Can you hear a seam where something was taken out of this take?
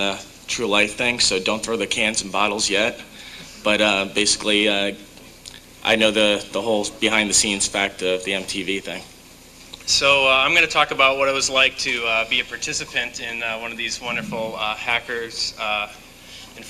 yes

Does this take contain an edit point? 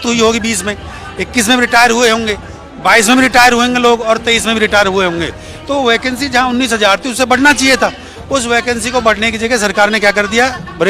no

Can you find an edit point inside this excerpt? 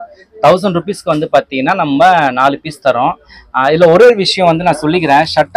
no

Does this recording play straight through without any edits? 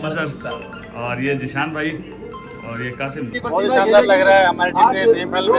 no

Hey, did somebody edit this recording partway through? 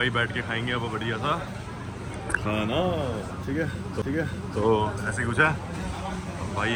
no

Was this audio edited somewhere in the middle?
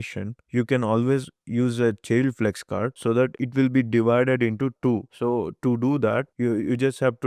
no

